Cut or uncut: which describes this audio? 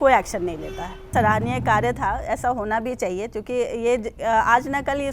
uncut